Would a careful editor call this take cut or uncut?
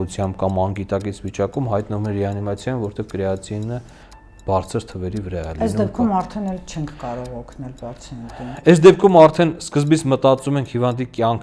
uncut